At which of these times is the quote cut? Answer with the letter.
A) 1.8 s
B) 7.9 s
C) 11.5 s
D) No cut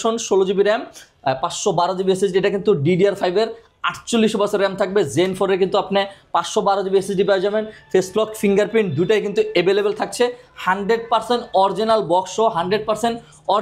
D